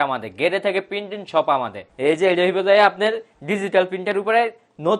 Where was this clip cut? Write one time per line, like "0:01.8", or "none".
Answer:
0:01.8